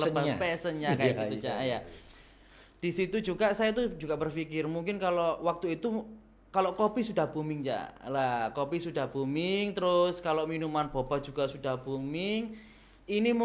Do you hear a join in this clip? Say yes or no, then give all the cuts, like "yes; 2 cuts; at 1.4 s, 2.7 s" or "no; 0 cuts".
no; 0 cuts